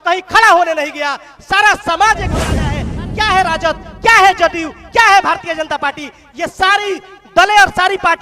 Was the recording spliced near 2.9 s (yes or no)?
yes